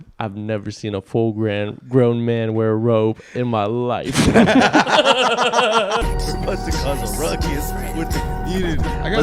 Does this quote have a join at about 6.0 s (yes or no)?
yes